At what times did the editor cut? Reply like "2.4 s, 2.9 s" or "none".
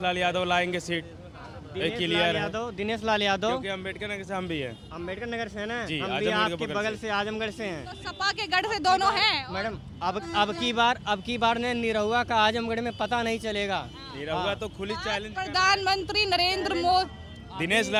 none